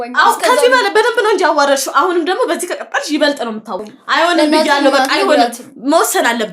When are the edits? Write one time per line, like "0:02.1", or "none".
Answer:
0:03.8